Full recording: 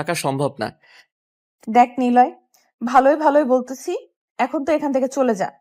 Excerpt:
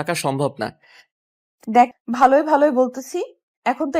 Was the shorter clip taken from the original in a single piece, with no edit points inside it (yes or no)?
no